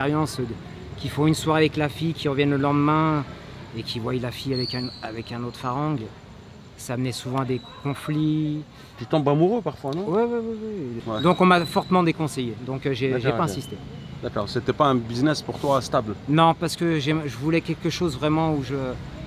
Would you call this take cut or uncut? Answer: uncut